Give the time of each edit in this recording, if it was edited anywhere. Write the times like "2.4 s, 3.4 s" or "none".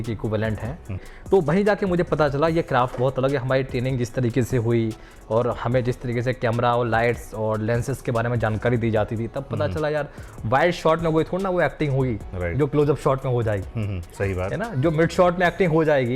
1.1 s